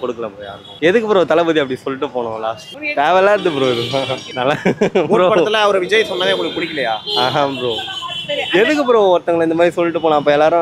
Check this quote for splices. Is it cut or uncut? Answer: uncut